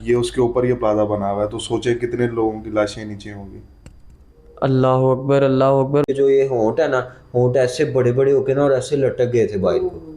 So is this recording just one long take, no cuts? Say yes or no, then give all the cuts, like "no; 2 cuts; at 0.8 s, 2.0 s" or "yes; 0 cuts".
no; 1 cut; at 6.1 s